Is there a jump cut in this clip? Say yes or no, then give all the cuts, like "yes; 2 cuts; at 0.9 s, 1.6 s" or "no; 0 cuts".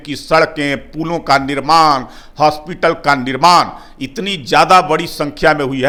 no; 0 cuts